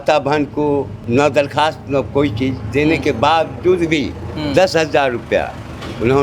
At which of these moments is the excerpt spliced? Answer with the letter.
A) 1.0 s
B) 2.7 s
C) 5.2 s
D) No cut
A